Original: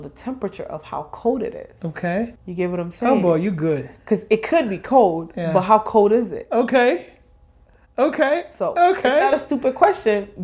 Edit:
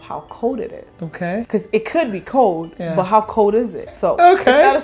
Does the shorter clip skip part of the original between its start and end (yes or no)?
yes